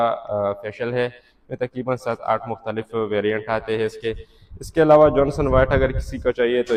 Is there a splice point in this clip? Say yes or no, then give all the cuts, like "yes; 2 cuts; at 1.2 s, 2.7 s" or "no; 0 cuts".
no; 0 cuts